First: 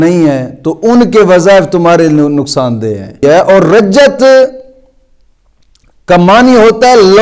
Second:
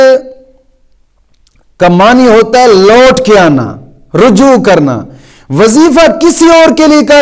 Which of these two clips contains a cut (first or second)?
first